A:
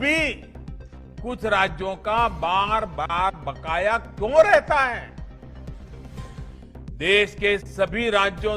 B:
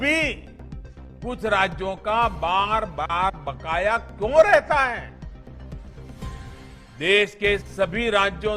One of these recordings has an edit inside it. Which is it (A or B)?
B